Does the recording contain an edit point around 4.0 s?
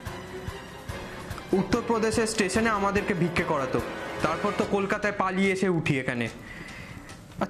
yes; 1 cut; at 4.0 s

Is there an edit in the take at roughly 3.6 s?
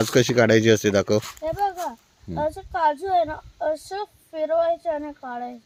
no; 0 cuts

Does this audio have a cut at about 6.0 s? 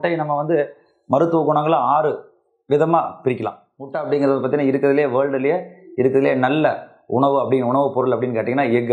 no; 1 cut; at 3.9 s

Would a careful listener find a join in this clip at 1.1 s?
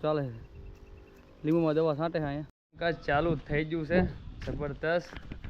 no; 1 cut; at 2.7 s

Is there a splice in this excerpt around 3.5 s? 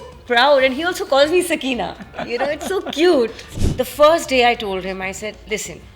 yes; 1 cut; at 3.5 s

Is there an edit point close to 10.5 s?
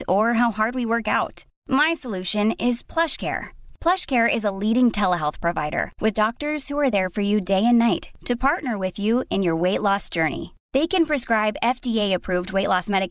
no; 0 cuts

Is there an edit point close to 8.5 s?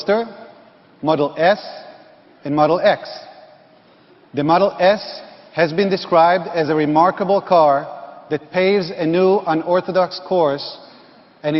yes; 1 cut; at 8.5 s

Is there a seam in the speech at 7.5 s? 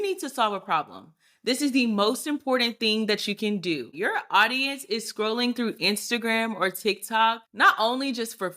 yes; 2 cuts; at 3.9 s, 7.5 s

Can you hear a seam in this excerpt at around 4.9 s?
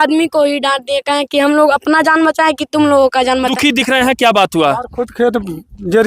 no; 1 cut; at 3.5 s

